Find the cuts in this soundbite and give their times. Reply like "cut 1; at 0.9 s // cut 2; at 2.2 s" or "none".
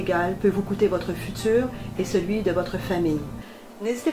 none

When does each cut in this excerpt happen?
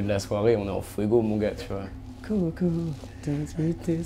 none

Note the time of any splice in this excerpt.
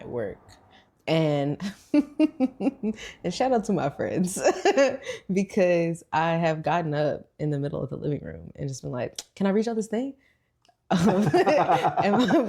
none

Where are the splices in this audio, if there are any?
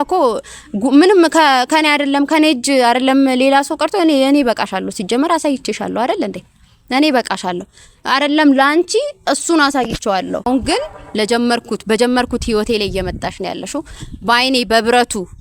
cut 1; at 10.5 s

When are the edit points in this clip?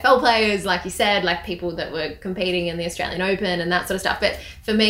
none

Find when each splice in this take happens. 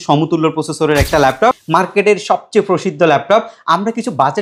cut 1; at 1.6 s

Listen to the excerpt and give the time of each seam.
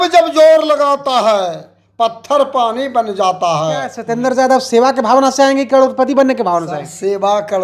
cut 1; at 4.0 s

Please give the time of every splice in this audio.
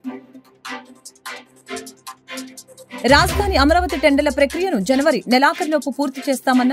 none

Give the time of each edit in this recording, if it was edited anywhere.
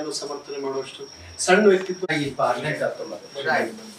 cut 1; at 2.1 s

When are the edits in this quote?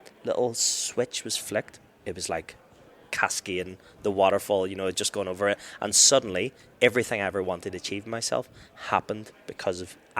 cut 1; at 1.8 s

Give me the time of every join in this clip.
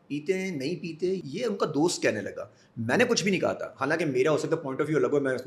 none

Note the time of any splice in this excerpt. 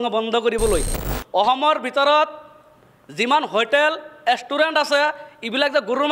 cut 1; at 1.0 s

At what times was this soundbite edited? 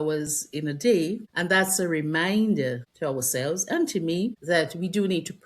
cut 1; at 1.3 s // cut 2; at 2.9 s // cut 3; at 4.4 s

